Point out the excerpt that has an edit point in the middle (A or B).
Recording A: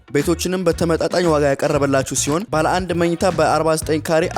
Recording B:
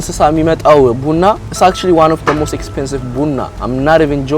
B